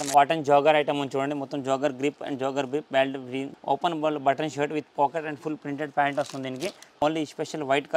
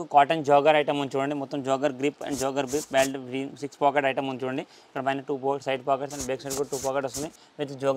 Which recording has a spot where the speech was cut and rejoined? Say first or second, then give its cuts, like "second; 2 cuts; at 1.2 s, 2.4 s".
first; 2 cuts; at 3.5 s, 7.0 s